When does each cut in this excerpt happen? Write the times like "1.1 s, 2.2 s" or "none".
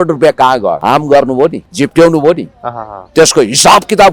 0.8 s, 1.6 s

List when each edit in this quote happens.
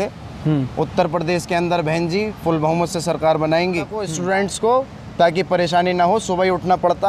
4.1 s

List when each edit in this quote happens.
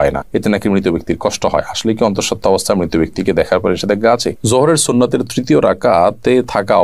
4.3 s

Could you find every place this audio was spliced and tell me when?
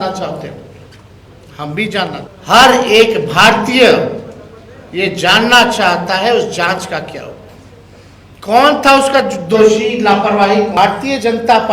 2.3 s, 10.7 s

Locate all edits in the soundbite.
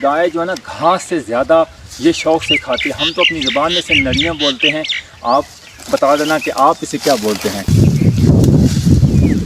7.6 s

